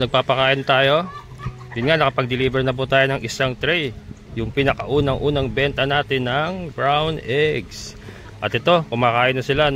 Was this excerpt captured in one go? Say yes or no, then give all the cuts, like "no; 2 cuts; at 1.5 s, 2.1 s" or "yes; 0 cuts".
yes; 0 cuts